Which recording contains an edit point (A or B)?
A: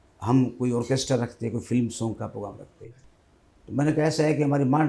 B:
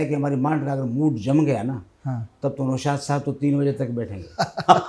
A